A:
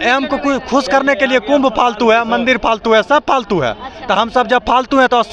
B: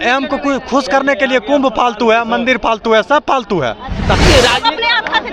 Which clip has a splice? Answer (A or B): B